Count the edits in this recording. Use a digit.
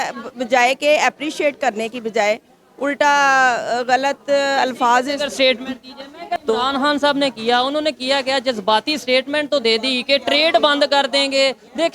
1